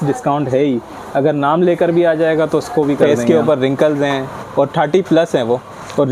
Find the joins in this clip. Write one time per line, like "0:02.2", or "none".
0:03.0